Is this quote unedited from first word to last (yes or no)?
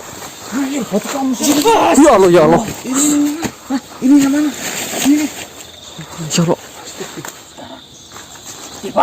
no